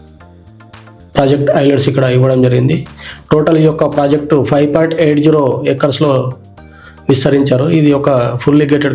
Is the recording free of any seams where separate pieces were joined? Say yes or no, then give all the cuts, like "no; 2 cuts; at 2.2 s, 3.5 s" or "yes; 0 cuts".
yes; 0 cuts